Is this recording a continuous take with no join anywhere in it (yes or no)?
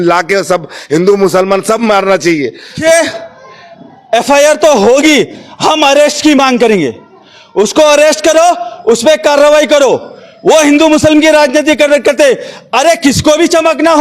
no